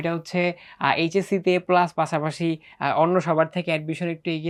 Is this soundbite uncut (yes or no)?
yes